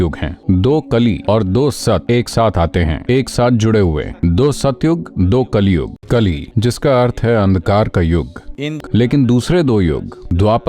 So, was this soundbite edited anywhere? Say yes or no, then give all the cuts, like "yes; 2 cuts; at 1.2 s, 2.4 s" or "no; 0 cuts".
yes; 2 cuts; at 5.9 s, 8.8 s